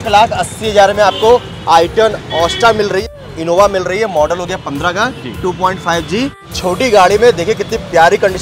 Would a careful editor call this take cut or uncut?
cut